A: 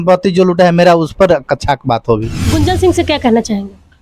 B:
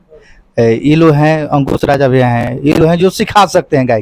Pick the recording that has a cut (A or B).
A